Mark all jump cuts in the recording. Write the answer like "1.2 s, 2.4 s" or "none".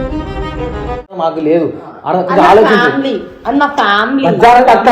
1.2 s